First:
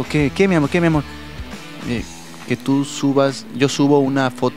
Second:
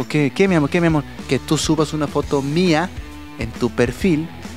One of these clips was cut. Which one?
second; 1 cut; at 1.2 s

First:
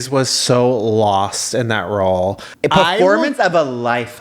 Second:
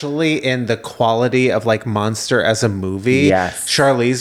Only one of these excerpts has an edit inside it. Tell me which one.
first; 1 cut; at 2.5 s

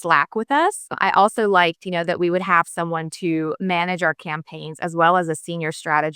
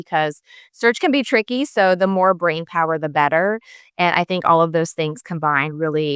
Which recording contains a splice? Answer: first; 1 cut; at 1.0 s

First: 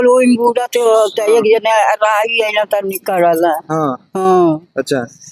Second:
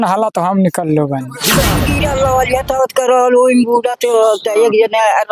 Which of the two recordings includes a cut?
second; 1 cut; at 1.8 s

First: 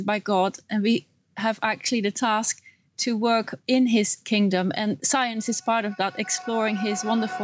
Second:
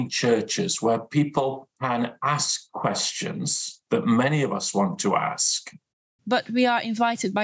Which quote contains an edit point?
second; 3 cuts; at 1.7 s, 3.7 s, 6.1 s

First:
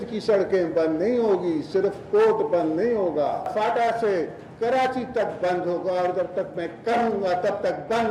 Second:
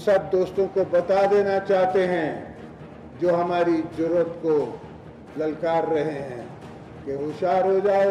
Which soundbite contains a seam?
first; 1 cut; at 3.5 s

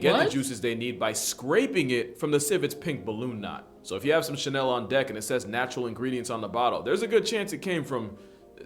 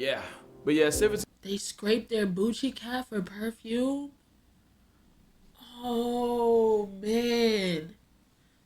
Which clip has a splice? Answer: second; 1 cut; at 4.5 s

